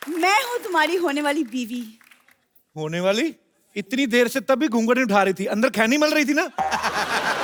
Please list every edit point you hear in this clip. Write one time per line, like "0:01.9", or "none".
none